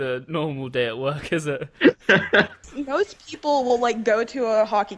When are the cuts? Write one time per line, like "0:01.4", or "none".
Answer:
0:02.7